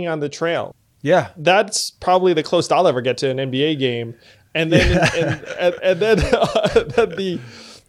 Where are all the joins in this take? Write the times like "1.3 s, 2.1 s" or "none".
1.2 s